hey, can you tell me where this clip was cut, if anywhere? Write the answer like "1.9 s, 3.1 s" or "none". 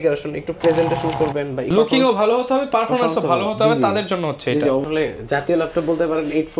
1.7 s, 4.8 s

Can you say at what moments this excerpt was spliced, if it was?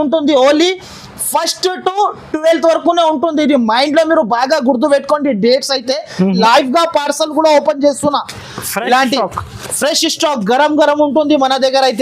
6.4 s

